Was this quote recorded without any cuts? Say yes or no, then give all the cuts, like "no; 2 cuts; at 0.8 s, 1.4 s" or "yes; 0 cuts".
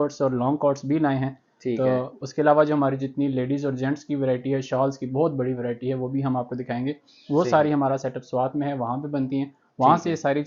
yes; 0 cuts